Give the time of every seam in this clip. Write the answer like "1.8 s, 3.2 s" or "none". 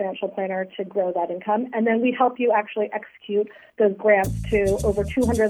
none